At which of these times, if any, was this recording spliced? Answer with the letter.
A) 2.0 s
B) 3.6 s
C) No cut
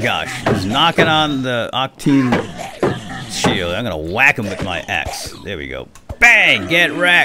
C